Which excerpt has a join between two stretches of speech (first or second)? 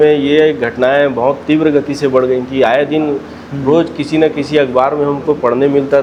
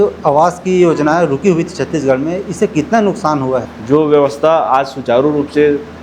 second